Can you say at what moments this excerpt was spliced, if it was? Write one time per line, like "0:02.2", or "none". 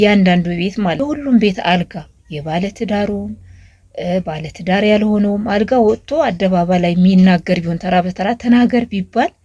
0:01.0